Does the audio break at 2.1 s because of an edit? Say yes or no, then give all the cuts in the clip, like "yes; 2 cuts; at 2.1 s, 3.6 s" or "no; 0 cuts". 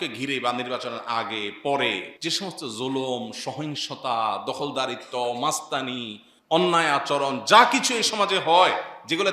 yes; 1 cut; at 2.1 s